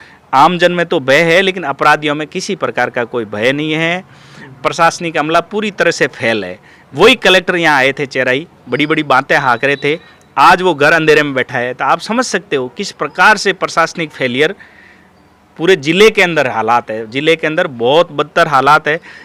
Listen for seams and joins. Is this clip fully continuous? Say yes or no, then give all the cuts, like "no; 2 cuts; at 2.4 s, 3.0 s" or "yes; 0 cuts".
yes; 0 cuts